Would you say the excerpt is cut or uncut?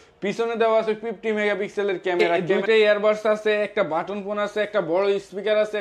cut